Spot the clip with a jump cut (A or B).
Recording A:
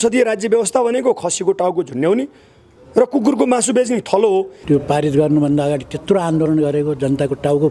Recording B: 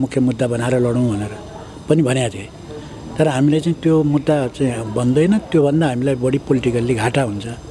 A